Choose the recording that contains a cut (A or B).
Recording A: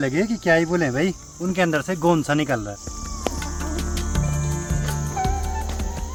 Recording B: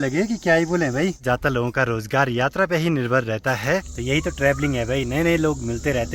B